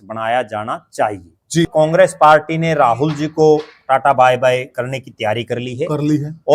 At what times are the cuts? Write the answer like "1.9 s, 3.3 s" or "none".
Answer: 1.7 s